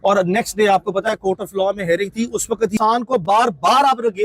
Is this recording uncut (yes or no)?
no